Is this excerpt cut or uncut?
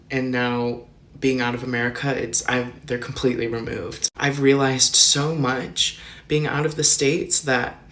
uncut